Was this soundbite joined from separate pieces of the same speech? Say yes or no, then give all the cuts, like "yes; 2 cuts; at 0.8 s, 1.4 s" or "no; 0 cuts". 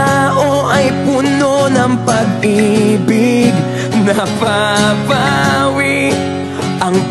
no; 0 cuts